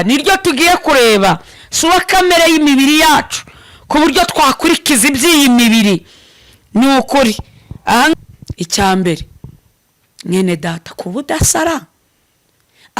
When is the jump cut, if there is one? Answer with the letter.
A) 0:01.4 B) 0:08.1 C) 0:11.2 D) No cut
B